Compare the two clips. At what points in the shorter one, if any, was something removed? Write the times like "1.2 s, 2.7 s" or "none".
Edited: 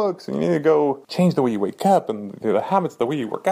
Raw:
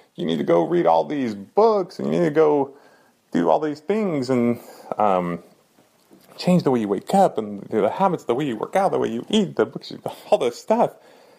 1.0 s